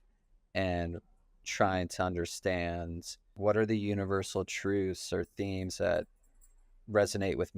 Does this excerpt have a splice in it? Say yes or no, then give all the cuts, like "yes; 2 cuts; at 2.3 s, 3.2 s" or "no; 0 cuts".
yes; 1 cut; at 3.4 s